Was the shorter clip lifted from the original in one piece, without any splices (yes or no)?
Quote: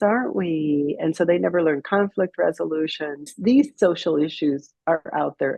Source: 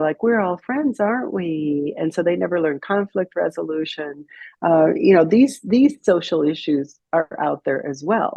no